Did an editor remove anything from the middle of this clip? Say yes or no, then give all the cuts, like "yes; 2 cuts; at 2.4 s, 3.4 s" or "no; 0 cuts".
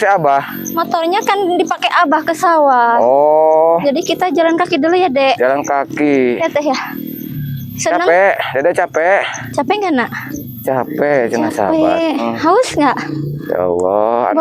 no; 0 cuts